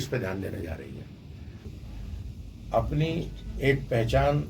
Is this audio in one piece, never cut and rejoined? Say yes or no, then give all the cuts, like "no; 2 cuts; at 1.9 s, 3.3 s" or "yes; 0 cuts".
no; 1 cut; at 1.7 s